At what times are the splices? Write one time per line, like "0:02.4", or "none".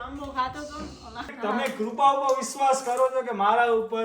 0:01.3

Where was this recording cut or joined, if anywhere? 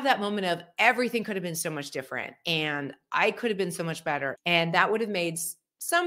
0:04.3

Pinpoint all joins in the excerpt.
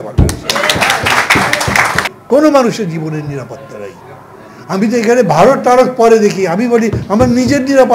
0:02.1

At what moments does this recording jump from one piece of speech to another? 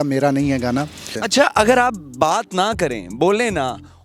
0:01.1

